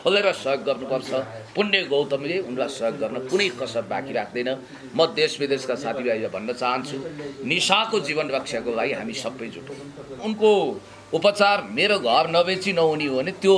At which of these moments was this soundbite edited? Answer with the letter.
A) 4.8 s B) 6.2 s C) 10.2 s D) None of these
C